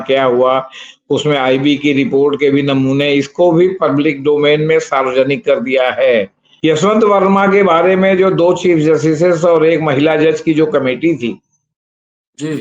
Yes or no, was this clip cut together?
yes